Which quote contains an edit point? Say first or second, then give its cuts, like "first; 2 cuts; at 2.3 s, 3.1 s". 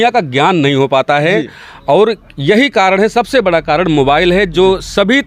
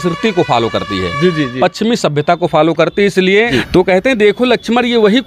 second; 1 cut; at 3.6 s